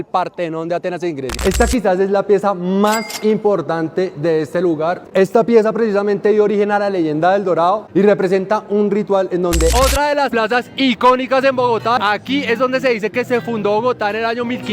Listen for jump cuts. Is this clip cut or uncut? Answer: cut